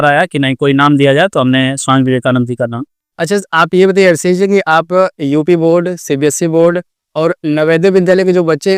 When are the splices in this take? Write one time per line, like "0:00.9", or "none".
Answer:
none